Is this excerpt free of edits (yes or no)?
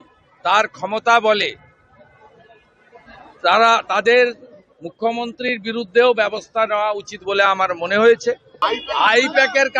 no